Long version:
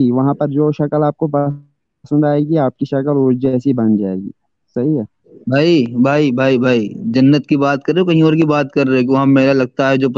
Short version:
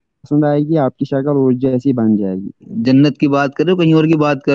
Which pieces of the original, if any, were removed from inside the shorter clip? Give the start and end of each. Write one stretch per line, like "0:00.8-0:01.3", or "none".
0:04.5-0:07.0